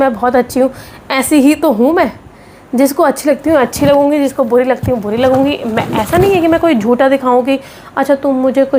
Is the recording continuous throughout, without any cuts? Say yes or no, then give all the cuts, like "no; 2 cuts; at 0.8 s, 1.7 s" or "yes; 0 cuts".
yes; 0 cuts